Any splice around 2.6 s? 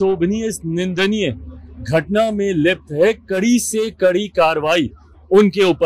no; 0 cuts

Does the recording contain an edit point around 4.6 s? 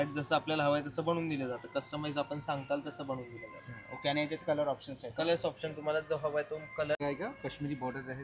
no; 1 cut; at 7.0 s

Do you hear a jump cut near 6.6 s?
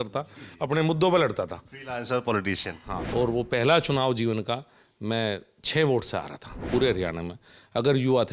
yes; 2 cuts; at 2.9 s, 6.6 s

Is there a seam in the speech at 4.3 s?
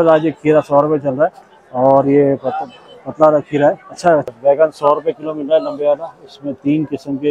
yes; 1 cut; at 4.3 s

